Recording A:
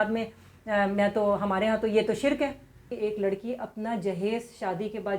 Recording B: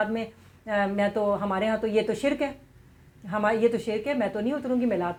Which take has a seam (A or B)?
A